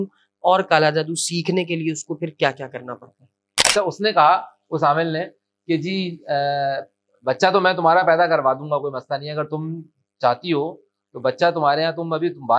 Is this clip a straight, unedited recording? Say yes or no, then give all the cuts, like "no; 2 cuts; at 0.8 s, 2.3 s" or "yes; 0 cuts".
no; 1 cut; at 3.6 s